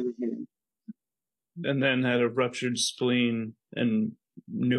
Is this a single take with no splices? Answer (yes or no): no